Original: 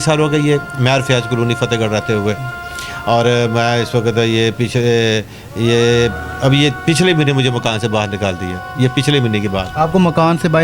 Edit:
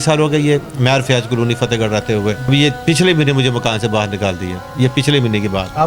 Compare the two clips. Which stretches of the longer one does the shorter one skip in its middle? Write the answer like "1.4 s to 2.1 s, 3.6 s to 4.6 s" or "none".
2.5 s to 6.5 s